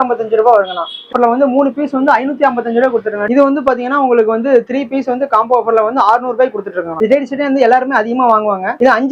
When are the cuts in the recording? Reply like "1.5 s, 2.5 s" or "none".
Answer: 1.1 s, 3.2 s, 6.9 s